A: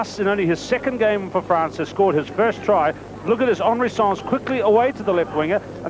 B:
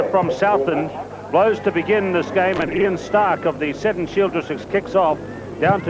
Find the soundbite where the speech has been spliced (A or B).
B